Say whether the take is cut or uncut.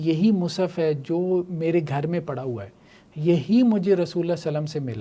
uncut